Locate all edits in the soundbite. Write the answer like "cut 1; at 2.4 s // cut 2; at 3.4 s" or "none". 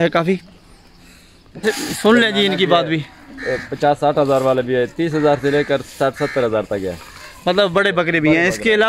cut 1; at 1.6 s